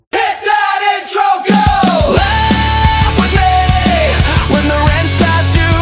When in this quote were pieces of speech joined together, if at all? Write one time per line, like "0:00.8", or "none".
none